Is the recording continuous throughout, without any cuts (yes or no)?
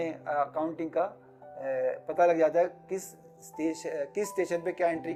yes